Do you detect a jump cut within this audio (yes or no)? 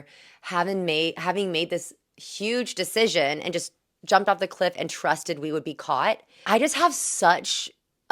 yes